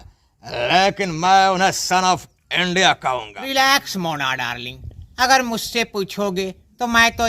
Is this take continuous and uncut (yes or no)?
no